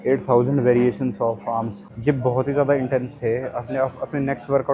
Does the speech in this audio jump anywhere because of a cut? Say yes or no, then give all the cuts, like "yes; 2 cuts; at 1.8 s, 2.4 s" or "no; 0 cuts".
yes; 1 cut; at 1.8 s